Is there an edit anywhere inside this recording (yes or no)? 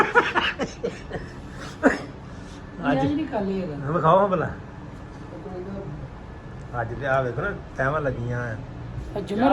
no